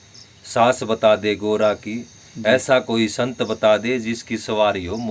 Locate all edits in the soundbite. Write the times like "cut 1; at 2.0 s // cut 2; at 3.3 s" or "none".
none

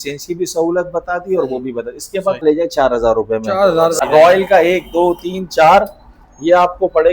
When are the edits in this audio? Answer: cut 1; at 2.4 s // cut 2; at 4.0 s

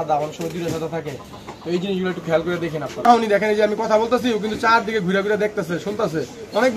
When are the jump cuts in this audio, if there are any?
cut 1; at 3.0 s

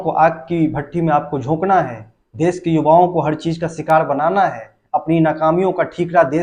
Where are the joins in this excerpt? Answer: none

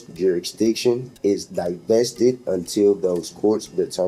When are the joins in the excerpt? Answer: none

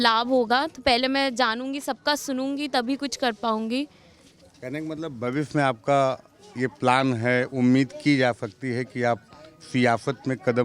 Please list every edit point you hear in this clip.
none

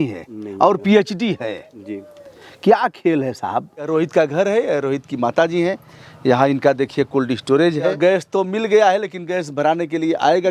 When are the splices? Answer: cut 1; at 3.9 s // cut 2; at 7.9 s

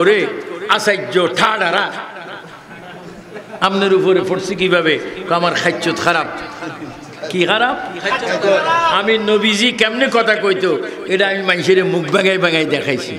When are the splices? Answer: none

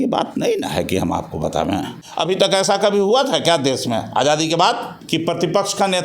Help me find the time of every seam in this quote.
cut 1; at 2.0 s // cut 2; at 4.9 s

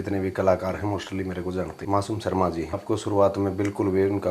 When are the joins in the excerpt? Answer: cut 1; at 1.8 s // cut 2; at 2.8 s

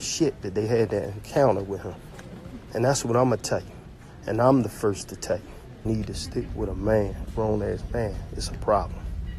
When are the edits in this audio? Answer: cut 1; at 5.8 s

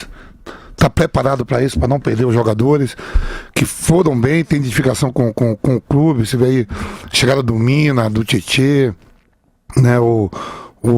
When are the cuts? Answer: cut 1; at 6.4 s

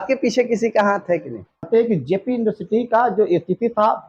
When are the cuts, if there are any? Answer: cut 1; at 1.7 s

